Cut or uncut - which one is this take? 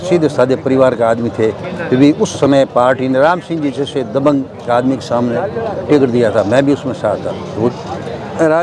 cut